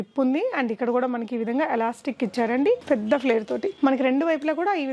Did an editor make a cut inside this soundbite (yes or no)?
yes